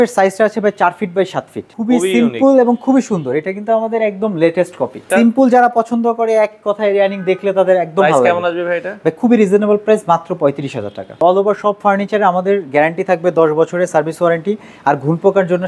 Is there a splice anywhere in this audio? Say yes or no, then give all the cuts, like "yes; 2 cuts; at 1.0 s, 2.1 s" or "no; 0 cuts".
yes; 3 cuts; at 1.7 s, 5.1 s, 11.2 s